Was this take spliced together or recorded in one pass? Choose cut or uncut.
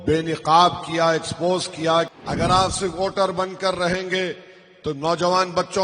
cut